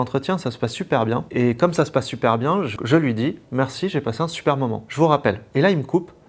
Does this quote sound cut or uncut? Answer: cut